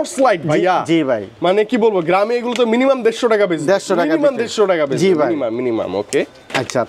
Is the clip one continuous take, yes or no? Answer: yes